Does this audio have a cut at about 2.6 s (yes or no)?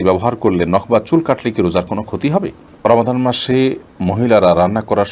yes